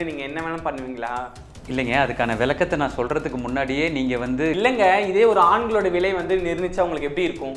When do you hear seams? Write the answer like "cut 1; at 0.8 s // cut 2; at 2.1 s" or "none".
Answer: cut 1; at 4.5 s